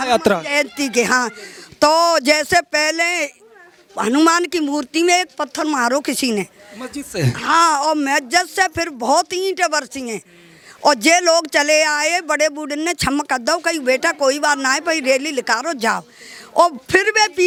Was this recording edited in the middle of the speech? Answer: no; 0 cuts

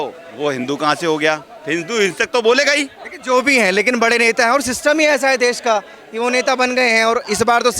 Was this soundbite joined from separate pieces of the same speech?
no; 0 cuts

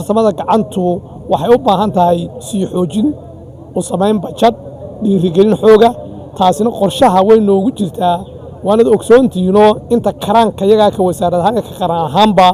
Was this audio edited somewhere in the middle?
no; 0 cuts

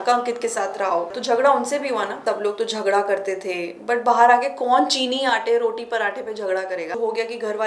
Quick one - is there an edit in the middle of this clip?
yes; 3 cuts; at 1.1 s, 2.2 s, 7.0 s

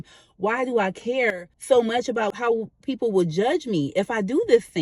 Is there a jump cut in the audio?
yes; 1 cut; at 2.3 s

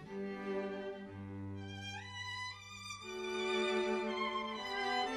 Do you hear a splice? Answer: no; 0 cuts

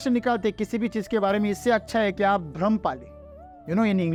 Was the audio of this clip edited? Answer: no; 0 cuts

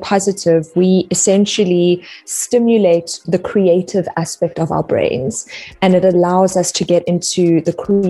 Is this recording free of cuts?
no; 1 cut; at 3.2 s

